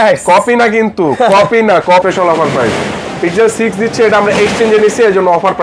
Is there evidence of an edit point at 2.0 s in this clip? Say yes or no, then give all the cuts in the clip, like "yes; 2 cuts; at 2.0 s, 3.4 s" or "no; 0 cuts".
yes; 1 cut; at 2.0 s